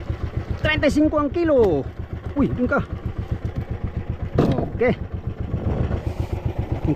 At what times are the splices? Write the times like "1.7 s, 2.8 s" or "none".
5.9 s